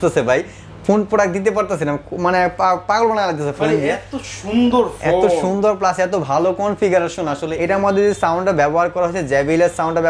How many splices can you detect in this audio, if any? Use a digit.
1